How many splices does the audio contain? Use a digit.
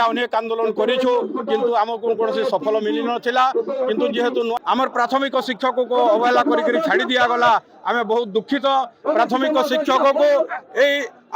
1